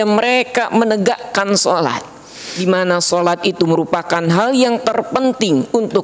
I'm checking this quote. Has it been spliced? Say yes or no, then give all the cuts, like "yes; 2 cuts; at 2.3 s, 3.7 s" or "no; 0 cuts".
yes; 1 cut; at 2.5 s